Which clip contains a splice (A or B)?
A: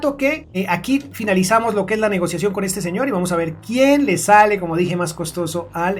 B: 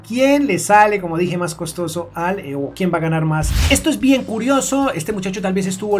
B